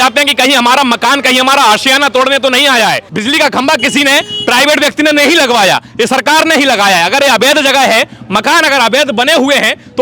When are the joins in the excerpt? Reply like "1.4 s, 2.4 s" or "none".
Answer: 3.1 s